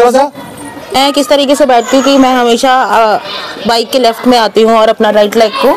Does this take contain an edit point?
yes; 1 cut; at 0.9 s

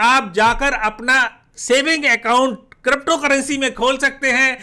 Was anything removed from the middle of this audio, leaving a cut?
no; 0 cuts

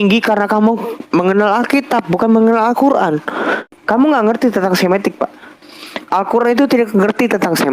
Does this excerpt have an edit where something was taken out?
yes; 1 cut; at 3.7 s

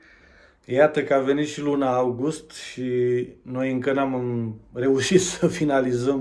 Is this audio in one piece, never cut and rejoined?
yes; 0 cuts

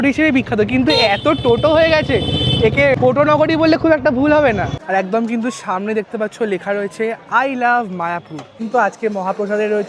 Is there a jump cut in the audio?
yes; 3 cuts; at 3.0 s, 4.8 s, 8.6 s

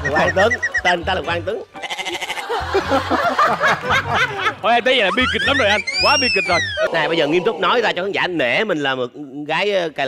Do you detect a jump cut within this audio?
yes; 1 cut; at 6.9 s

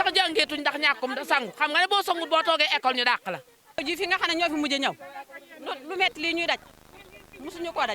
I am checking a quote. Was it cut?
yes; 1 cut; at 3.8 s

